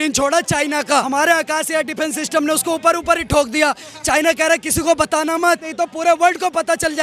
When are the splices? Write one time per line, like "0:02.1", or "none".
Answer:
0:01.1
0:05.7

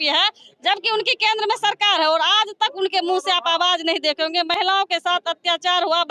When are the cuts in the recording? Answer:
none

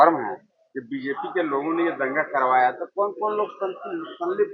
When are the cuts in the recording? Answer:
none

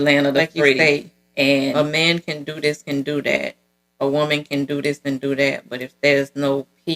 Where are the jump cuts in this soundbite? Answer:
0:01.7

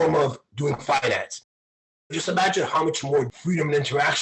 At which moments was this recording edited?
0:01.8
0:03.3

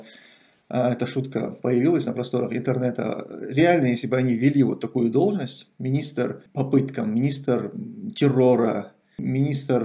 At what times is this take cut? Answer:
0:06.4

